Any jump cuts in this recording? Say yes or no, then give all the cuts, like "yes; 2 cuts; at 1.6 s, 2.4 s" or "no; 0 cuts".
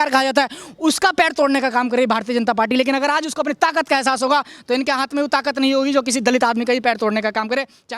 no; 0 cuts